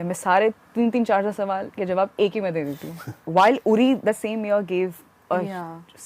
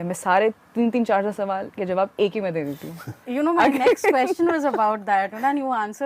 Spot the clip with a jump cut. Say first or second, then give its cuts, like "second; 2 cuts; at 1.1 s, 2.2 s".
first; 1 cut; at 3.1 s